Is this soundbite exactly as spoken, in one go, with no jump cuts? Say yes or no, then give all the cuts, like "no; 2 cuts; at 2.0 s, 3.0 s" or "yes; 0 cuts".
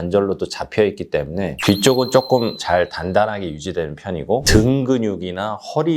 no; 1 cut; at 4.4 s